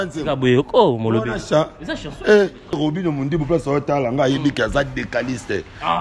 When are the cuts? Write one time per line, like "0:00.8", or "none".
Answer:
0:02.8